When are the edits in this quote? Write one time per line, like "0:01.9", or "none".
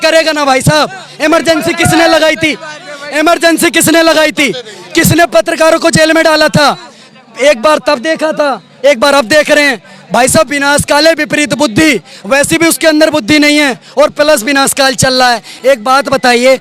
none